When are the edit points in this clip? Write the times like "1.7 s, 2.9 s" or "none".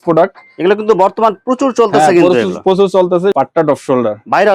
3.3 s